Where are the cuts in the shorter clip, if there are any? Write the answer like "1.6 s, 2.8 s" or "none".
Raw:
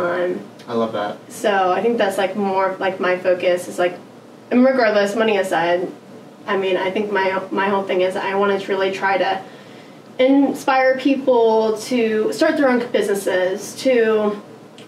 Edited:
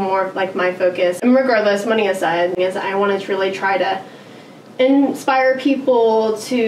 1.2 s, 2.6 s